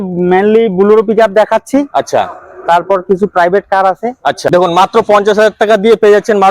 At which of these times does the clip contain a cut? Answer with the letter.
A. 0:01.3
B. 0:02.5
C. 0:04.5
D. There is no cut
C